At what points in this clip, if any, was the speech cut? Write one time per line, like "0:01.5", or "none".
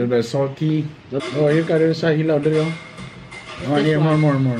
0:01.1